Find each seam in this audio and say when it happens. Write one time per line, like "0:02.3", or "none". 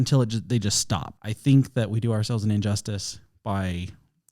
0:01.1